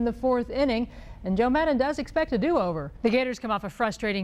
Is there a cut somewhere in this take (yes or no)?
yes